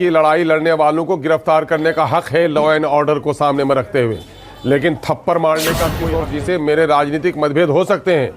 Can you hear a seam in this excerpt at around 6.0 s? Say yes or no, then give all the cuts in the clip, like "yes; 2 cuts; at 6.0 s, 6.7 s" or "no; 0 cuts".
yes; 1 cut; at 6.0 s